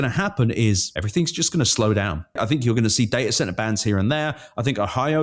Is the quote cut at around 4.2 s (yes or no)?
no